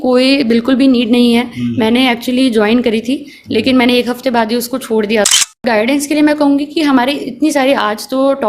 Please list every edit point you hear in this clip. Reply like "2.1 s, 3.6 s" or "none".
5.6 s